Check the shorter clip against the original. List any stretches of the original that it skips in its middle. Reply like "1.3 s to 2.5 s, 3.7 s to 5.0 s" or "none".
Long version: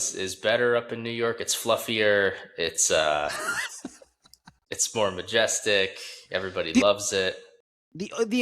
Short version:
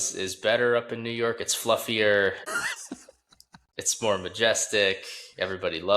2.5 s to 3.4 s